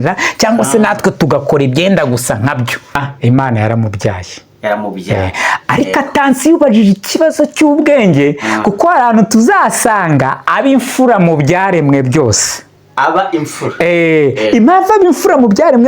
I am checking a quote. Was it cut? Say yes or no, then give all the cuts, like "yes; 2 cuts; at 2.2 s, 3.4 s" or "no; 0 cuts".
yes; 1 cut; at 3.1 s